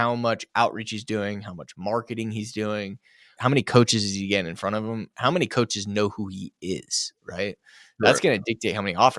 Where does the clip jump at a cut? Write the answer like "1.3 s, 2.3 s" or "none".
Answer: 3.3 s